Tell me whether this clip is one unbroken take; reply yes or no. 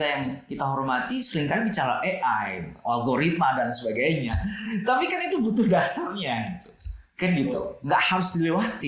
yes